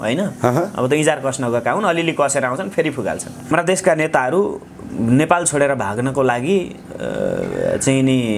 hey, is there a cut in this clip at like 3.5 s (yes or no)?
yes